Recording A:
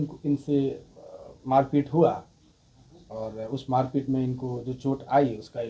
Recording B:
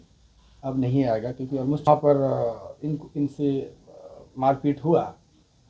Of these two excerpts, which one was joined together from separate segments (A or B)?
B